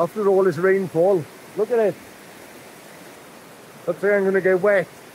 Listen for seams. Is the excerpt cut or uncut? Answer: cut